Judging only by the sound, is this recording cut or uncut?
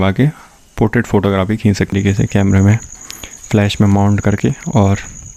cut